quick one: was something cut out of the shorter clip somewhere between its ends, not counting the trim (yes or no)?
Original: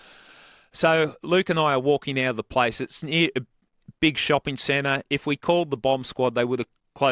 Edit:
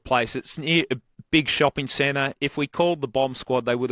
yes